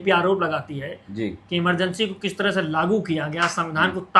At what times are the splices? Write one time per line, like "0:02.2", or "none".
none